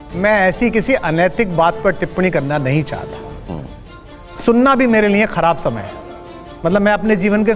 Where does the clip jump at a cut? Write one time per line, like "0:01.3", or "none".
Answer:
0:04.1